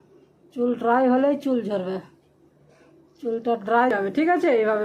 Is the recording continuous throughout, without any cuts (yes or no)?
no